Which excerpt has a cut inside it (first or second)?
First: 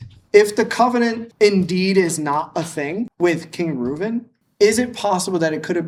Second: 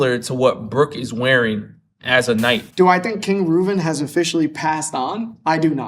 second